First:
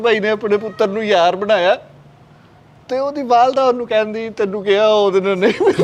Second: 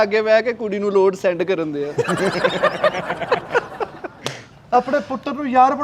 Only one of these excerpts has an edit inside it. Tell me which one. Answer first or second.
second